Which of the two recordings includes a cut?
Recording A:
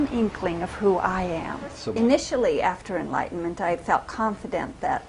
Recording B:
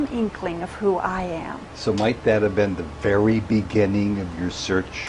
A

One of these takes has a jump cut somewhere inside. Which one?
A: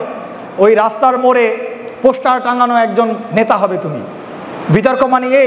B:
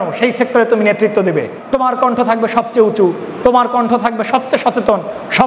B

